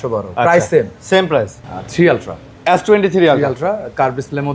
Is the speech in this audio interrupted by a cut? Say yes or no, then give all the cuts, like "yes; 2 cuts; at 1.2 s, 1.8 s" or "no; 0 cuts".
yes; 1 cut; at 1.6 s